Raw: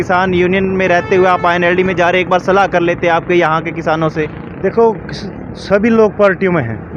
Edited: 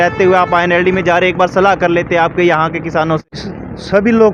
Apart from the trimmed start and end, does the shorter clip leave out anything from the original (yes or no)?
yes